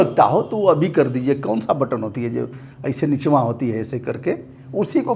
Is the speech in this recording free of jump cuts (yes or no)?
yes